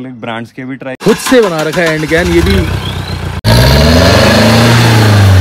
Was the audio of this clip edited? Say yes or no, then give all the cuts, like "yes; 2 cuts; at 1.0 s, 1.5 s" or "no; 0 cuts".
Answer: yes; 2 cuts; at 1.0 s, 3.4 s